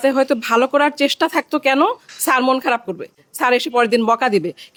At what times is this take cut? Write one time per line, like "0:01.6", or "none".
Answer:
none